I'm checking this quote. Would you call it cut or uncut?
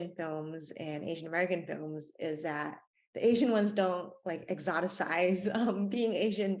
uncut